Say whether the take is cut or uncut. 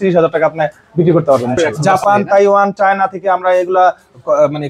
cut